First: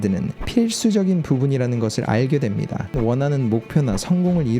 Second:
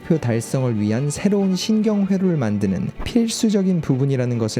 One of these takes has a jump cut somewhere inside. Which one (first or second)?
first